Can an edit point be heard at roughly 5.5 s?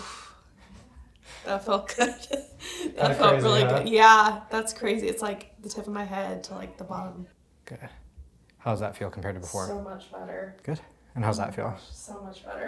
no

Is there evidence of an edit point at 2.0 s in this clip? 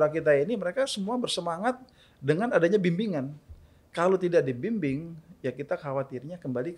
no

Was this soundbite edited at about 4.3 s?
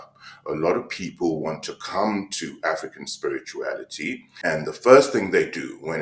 yes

